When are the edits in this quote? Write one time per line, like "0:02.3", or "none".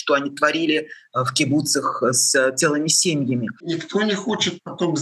0:03.7